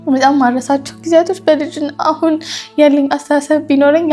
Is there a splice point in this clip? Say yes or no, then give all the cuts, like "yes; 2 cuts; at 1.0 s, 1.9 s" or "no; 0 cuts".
no; 0 cuts